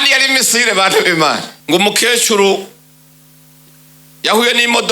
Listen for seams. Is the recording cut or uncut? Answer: cut